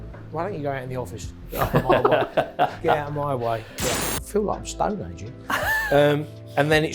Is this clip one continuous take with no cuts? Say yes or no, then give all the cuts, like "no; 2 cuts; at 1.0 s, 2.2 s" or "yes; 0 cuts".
no; 1 cut; at 3.8 s